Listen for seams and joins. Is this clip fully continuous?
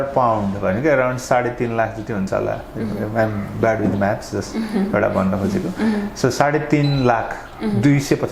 yes; 0 cuts

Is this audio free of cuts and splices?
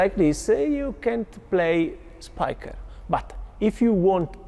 yes; 0 cuts

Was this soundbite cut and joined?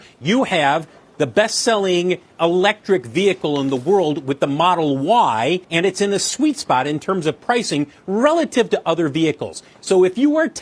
yes; 1 cut; at 5.7 s

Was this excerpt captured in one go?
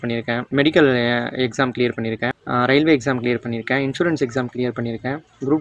yes; 0 cuts

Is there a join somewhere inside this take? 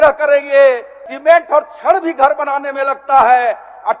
yes; 1 cut; at 1.1 s

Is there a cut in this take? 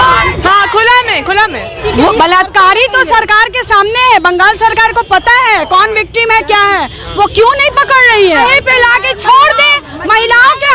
yes; 2 cuts; at 1.7 s, 8.4 s

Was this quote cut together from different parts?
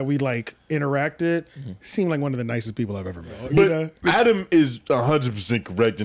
yes; 1 cut; at 3.4 s

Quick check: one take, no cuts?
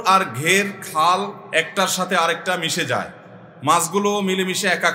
yes; 0 cuts

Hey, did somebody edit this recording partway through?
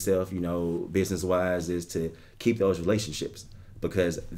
no; 0 cuts

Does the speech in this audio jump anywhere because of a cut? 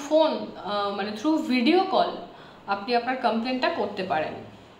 no; 0 cuts

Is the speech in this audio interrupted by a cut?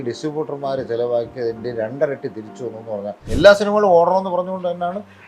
yes; 1 cut; at 3.2 s

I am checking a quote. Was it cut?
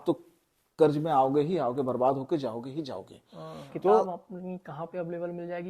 yes; 1 cut; at 4.1 s

